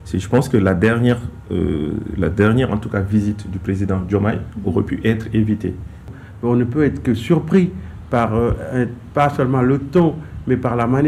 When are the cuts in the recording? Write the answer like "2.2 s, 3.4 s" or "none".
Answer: 6.1 s